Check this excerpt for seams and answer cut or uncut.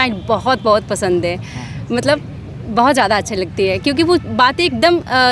uncut